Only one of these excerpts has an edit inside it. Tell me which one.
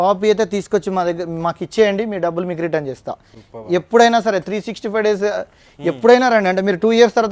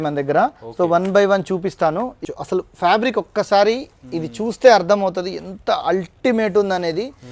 second; 1 cut; at 2.3 s

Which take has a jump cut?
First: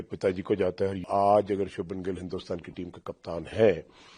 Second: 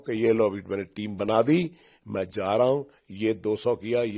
first; 1 cut; at 1.0 s

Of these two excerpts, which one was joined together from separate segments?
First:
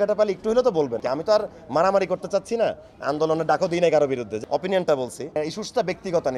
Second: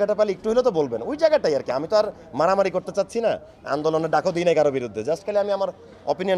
first; 3 cuts; at 1.0 s, 4.3 s, 5.4 s

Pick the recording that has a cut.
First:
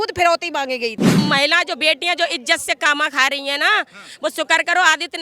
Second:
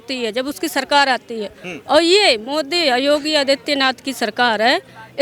first; 1 cut; at 1.2 s

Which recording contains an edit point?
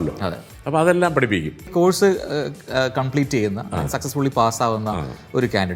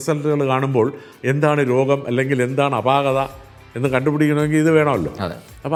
first; 1 cut; at 1.7 s

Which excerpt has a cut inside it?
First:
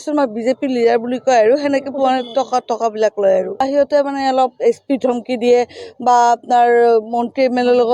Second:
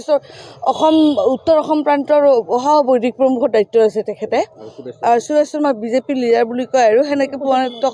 first; 1 cut; at 3.6 s

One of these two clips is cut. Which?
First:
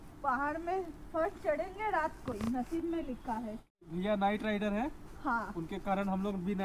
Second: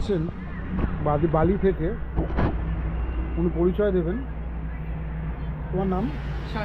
first; 1 cut; at 3.8 s

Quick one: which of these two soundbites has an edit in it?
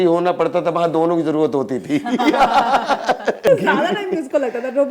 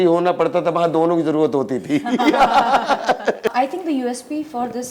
second; 1 cut; at 3.5 s

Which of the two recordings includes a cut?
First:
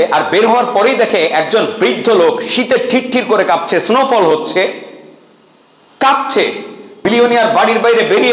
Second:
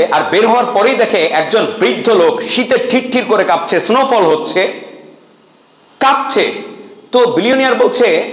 first; 1 cut; at 7.0 s

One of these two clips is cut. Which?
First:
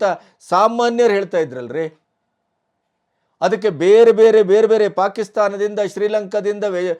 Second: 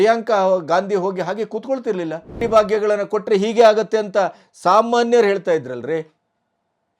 second; 1 cut; at 2.4 s

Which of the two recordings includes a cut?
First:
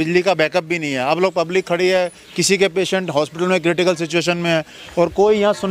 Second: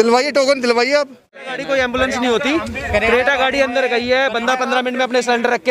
second; 1 cut; at 1.3 s

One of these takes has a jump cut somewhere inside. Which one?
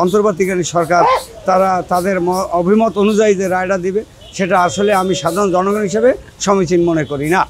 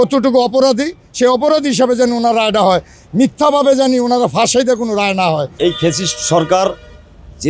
second; 1 cut; at 5.6 s

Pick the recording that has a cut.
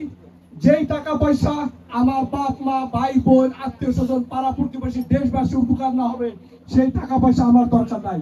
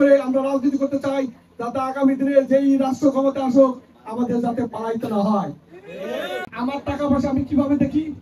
second; 1 cut; at 6.5 s

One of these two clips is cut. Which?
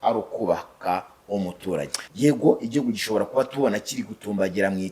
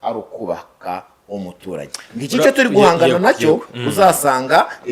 first; 1 cut; at 2.0 s

